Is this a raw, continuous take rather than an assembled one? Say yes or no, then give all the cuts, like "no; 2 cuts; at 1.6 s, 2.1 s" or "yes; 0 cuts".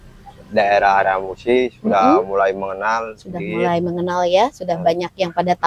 yes; 0 cuts